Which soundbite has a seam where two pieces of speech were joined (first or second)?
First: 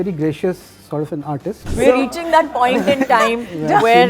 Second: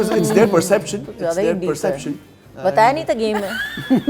first